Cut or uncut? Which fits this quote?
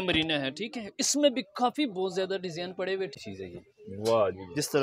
cut